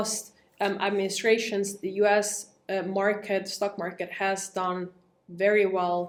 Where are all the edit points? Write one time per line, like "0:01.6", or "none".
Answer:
none